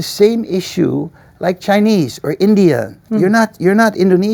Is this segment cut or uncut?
uncut